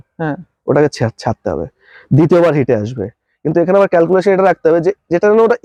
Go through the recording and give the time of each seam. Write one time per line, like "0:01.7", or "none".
none